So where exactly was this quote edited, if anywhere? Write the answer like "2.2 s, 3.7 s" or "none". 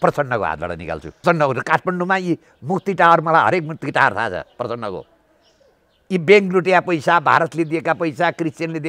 1.2 s